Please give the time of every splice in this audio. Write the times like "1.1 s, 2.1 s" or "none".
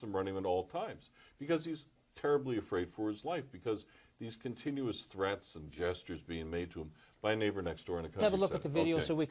8.2 s

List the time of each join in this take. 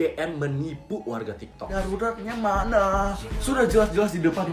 1.7 s

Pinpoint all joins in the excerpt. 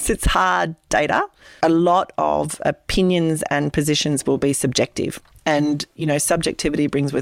1.4 s

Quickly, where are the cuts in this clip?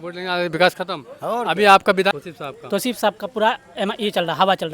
2.1 s

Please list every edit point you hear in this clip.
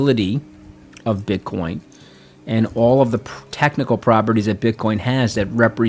none

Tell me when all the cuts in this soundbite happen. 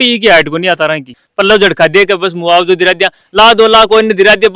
1.1 s

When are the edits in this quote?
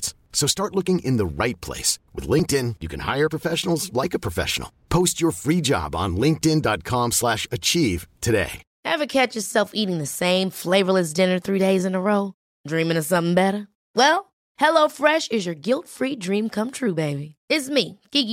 8.7 s

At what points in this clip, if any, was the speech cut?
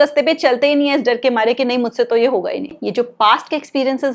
2.8 s

